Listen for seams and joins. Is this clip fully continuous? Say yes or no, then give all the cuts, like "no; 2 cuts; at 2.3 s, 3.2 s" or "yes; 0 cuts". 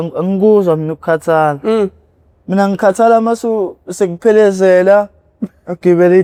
yes; 0 cuts